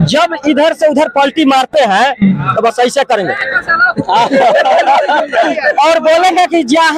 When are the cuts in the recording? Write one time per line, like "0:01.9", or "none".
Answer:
none

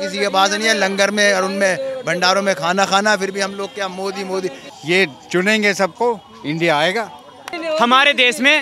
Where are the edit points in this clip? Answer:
0:04.7
0:07.6

